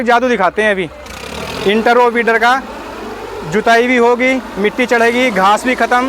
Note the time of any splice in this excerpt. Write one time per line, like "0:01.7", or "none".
none